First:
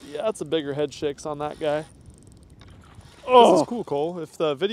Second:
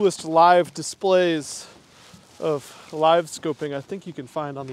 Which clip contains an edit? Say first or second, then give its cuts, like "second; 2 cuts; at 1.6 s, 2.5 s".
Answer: first; 1 cut; at 3.7 s